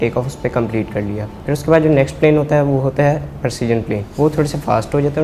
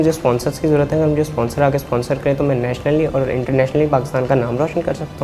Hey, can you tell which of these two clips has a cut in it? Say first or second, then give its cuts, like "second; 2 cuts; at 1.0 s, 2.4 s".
first; 2 cuts; at 1.3 s, 4.1 s